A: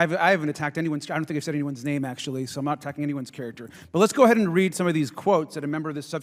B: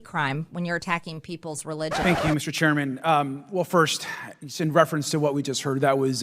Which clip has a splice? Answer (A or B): B